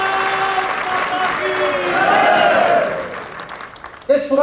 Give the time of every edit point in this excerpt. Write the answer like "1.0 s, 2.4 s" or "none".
none